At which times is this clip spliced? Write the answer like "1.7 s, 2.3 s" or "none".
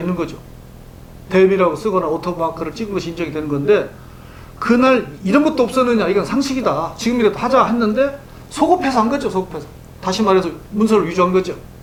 none